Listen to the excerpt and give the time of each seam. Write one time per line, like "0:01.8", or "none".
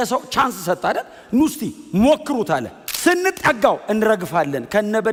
none